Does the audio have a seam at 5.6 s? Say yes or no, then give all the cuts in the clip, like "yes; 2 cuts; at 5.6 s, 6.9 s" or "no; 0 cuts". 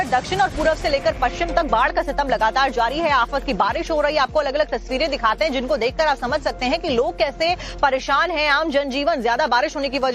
yes; 1 cut; at 5.6 s